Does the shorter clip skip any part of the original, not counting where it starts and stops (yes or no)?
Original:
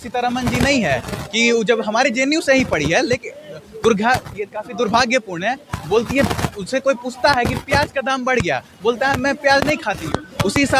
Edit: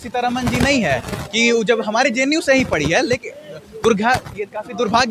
no